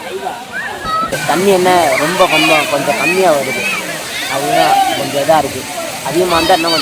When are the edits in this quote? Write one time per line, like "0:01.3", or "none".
0:01.2